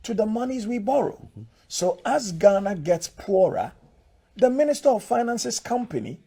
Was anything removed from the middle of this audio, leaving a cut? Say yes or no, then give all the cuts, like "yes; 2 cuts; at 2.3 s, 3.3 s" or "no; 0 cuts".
no; 0 cuts